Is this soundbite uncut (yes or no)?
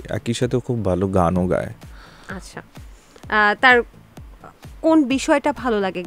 yes